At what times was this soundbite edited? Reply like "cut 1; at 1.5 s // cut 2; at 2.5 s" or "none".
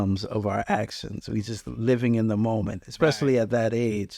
none

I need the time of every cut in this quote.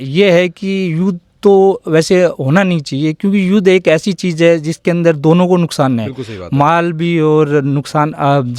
none

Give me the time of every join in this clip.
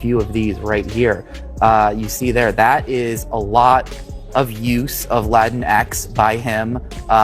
none

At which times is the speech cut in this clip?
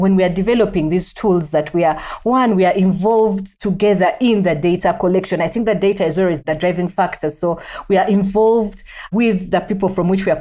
none

